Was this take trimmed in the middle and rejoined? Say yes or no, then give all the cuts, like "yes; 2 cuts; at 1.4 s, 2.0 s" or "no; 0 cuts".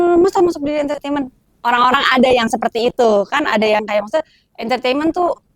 no; 0 cuts